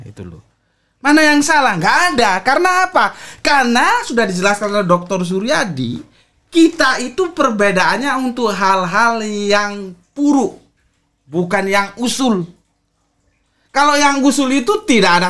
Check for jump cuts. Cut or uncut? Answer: uncut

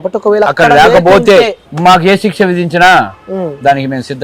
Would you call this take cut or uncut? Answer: cut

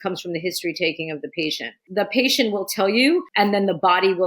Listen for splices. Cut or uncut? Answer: cut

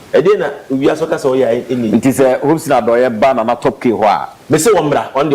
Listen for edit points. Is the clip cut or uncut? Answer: uncut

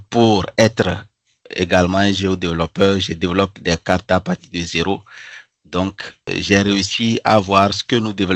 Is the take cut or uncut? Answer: uncut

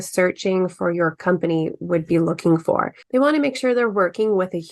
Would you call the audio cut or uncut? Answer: cut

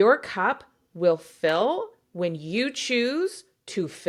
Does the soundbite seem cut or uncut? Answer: uncut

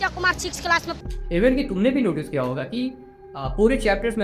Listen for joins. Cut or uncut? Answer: cut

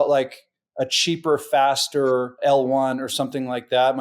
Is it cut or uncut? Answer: cut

